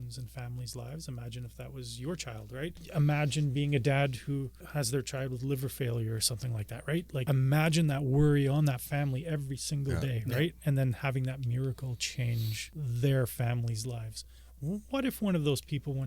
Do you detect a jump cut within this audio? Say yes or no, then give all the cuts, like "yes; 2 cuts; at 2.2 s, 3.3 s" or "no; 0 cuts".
yes; 4 cuts; at 2.8 s, 4.6 s, 7.2 s, 12.6 s